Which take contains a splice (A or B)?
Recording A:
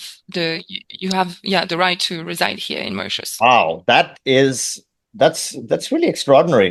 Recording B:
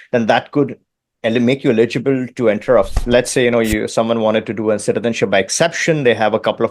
B